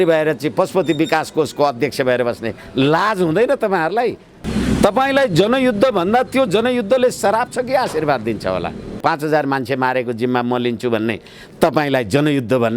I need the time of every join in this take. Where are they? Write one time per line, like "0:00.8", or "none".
0:04.3
0:09.0